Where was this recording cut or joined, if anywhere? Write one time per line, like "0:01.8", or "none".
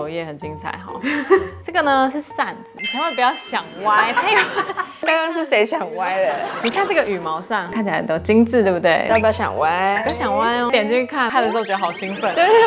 0:01.5